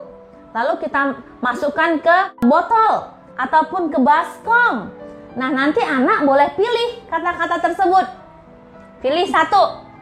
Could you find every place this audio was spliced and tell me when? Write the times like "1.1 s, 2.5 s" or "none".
2.4 s

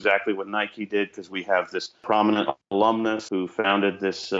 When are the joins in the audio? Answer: 2.0 s, 3.2 s

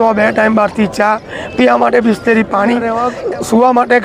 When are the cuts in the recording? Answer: 3.0 s

